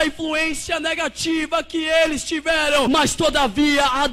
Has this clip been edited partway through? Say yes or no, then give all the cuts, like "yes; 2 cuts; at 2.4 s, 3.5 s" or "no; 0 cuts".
yes; 1 cut; at 2.9 s